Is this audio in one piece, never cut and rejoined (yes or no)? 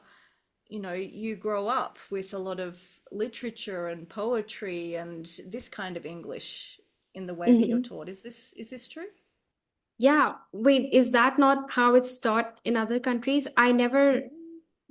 yes